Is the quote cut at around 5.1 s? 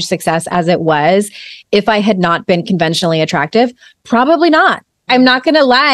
yes; 1 cut; at 5.1 s

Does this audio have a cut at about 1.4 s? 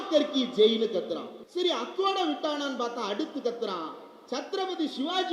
yes; 1 cut; at 1.4 s

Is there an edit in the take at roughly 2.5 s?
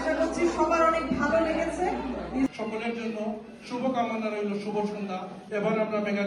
yes; 1 cut; at 2.5 s

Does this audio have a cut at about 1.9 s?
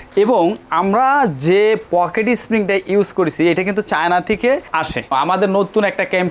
no; 1 cut; at 5.1 s

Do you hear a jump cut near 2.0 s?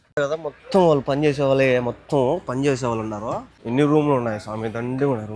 no; 1 cut; at 3.5 s

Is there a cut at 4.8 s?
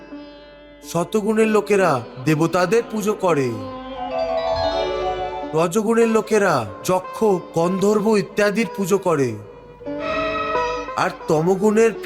yes; 2 cuts; at 4.8 s, 10.1 s

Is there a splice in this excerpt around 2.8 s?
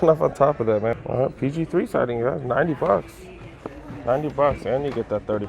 no; 1 cut; at 0.9 s

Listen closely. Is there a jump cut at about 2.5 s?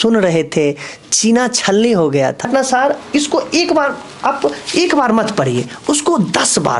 yes; 1 cut; at 2.5 s

